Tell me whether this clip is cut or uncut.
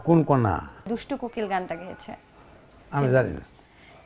cut